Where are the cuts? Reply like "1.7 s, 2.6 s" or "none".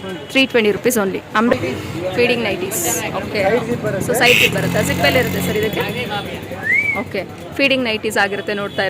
1.5 s